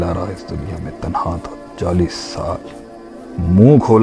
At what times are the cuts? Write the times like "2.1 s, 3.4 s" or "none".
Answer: 2.6 s